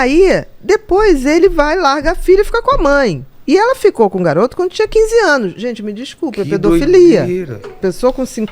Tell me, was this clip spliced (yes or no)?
yes